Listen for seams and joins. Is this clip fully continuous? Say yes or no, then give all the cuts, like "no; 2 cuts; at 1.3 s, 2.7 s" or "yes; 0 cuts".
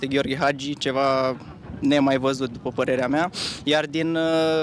yes; 0 cuts